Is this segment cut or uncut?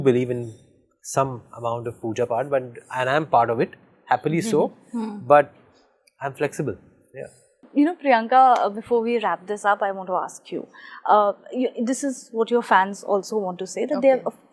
uncut